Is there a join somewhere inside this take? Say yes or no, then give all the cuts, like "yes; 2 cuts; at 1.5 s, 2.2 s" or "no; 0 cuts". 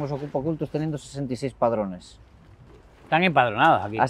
no; 0 cuts